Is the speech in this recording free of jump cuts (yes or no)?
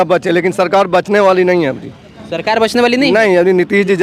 yes